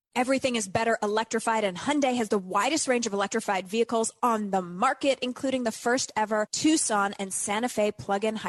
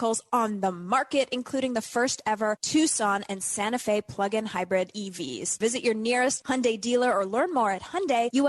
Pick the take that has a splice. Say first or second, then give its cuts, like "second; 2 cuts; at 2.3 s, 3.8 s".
second; 1 cut; at 5.5 s